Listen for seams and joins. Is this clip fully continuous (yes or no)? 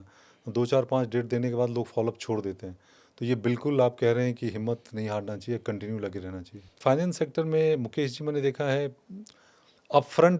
no